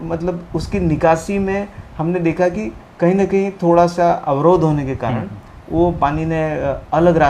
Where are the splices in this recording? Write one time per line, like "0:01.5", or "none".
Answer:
none

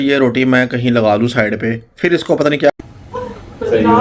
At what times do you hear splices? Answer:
0:02.7

